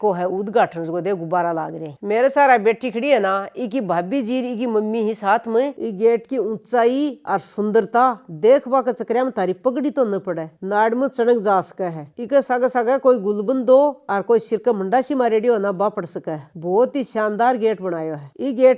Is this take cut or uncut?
uncut